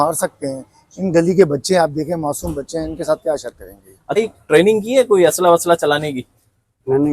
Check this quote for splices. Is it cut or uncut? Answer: cut